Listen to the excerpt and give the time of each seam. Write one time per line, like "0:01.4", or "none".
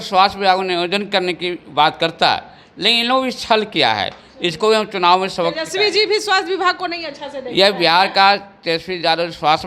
none